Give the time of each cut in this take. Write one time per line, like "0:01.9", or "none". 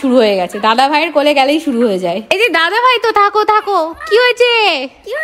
none